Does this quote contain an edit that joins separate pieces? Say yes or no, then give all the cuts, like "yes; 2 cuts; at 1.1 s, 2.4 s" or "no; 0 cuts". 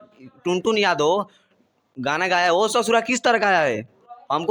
no; 0 cuts